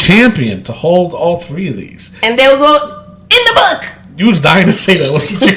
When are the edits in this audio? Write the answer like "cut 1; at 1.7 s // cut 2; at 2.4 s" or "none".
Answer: none